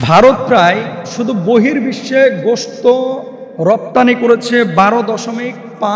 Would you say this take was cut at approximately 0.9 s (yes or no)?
no